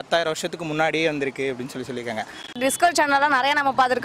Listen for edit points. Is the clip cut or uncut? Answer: cut